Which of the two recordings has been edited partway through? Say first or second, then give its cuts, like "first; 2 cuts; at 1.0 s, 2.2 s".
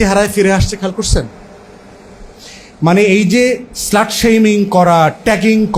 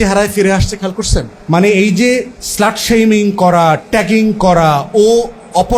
second; 1 cut; at 1.3 s